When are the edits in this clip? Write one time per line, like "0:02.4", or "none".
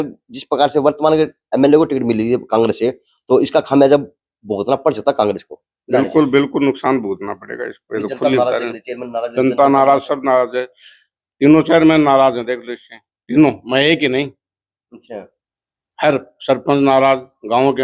none